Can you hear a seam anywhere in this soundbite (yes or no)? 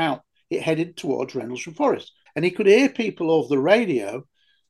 yes